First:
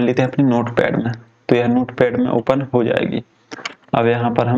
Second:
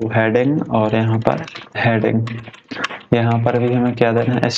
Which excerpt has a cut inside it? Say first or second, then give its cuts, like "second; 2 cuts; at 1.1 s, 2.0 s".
second; 1 cut; at 1.6 s